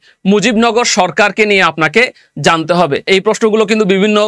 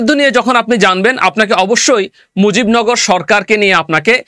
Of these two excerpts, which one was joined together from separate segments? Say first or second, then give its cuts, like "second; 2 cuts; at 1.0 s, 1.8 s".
first; 1 cut; at 3.1 s